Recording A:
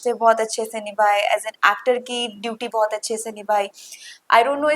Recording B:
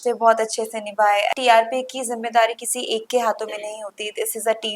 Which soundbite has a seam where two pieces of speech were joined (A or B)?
B